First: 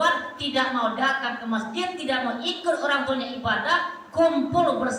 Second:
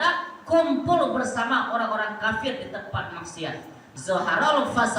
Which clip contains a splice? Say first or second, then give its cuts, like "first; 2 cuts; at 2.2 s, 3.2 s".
second; 1 cut; at 3.9 s